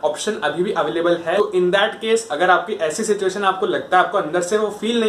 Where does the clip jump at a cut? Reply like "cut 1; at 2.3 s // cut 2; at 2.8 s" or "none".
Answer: cut 1; at 1.4 s